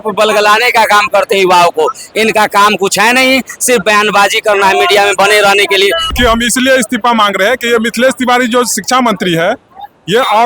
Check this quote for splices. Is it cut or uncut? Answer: cut